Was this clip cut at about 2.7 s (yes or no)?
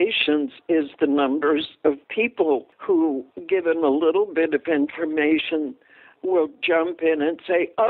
yes